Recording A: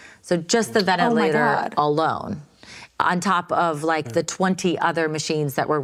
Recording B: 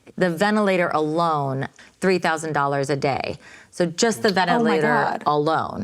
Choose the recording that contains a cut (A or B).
B